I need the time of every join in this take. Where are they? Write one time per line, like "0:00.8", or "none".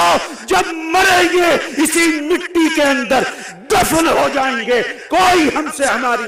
none

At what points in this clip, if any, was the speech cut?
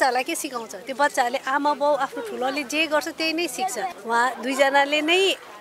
0:03.9

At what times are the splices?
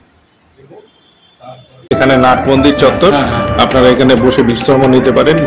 0:01.9

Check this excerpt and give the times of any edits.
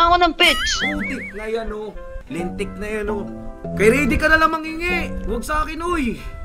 none

